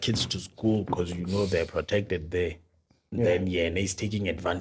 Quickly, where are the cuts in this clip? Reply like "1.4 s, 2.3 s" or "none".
none

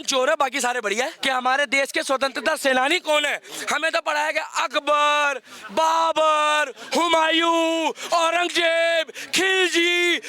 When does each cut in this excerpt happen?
1.2 s

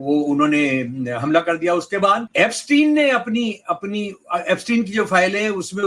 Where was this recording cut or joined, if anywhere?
2.3 s

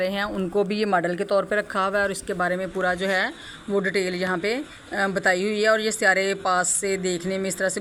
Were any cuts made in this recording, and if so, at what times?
none

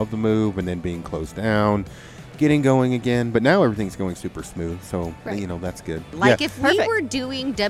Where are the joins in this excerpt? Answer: 6.1 s

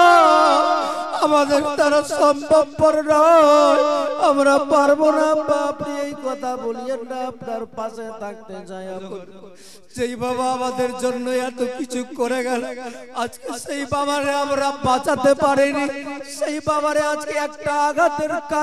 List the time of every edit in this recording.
9.0 s

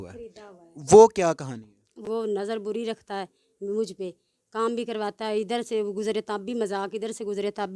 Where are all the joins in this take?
2.0 s

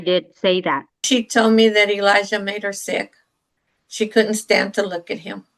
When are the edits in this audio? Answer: 1.0 s

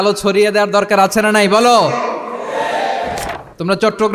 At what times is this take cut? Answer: 3.2 s

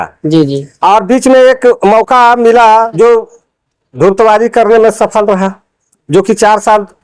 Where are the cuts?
2.9 s

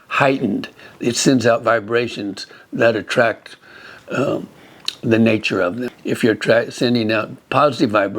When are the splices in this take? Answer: 5.9 s

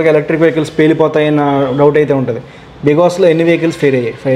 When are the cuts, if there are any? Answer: none

